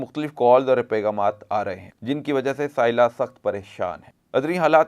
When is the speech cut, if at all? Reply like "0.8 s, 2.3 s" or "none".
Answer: 1.9 s